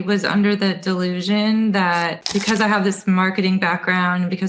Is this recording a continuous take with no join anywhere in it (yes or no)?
no